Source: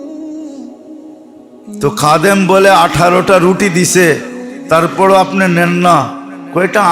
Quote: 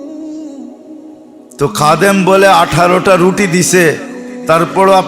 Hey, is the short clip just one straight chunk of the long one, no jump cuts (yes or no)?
no